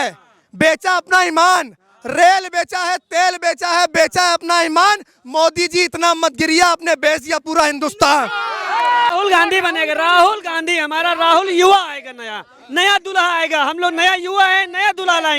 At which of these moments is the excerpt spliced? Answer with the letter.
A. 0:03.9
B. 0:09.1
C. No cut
B